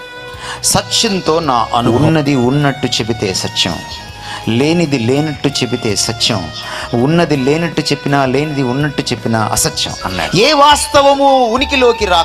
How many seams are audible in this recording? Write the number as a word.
two